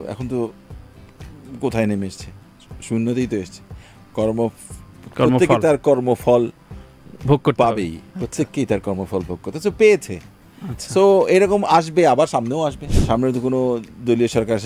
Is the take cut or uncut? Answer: cut